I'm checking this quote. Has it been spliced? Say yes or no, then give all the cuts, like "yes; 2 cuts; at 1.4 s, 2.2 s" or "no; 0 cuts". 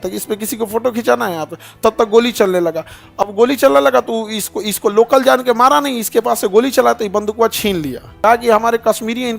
yes; 1 cut; at 8.2 s